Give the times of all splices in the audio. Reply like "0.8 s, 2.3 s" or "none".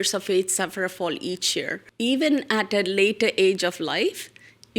1.8 s

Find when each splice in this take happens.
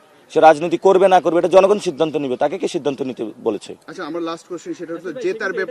none

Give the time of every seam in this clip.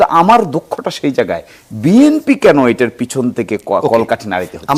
none

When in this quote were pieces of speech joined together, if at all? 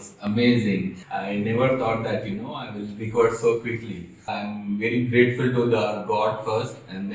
1.0 s, 4.2 s

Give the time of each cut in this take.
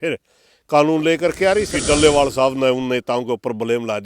1.7 s

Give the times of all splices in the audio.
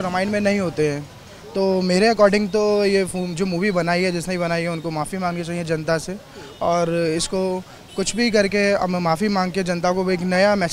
none

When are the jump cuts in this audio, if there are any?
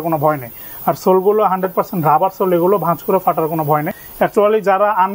4.0 s

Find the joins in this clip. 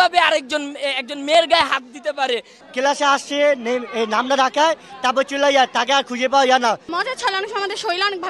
2.5 s, 6.9 s

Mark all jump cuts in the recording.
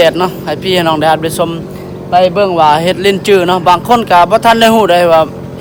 none

